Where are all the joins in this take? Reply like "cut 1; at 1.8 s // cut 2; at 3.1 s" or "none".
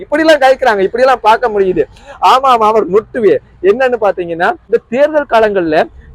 cut 1; at 4.6 s